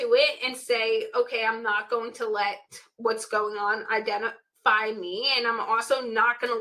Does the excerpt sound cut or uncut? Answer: uncut